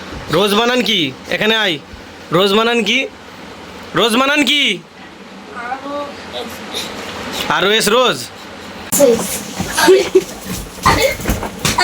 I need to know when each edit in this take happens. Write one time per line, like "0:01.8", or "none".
0:08.9